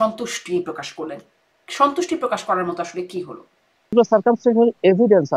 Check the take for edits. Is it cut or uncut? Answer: cut